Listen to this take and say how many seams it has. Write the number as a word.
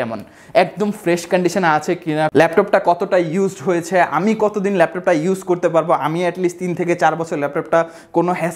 zero